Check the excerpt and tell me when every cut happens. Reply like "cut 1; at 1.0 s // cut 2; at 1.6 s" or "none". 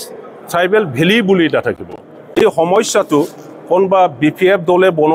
cut 1; at 2.2 s